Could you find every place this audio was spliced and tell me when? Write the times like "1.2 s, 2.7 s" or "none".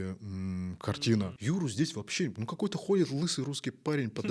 1.4 s